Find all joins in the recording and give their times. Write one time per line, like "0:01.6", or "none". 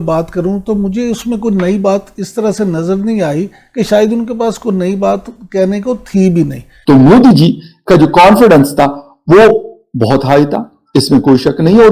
0:06.7